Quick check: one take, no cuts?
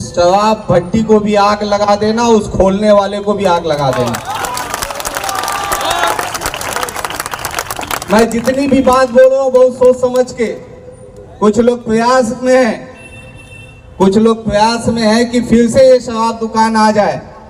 yes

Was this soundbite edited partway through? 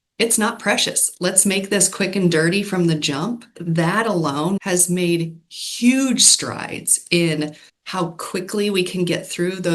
yes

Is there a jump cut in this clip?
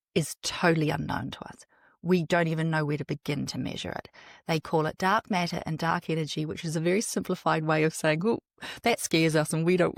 no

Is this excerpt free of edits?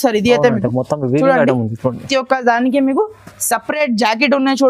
no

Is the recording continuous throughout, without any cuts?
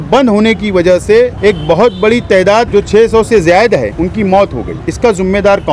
no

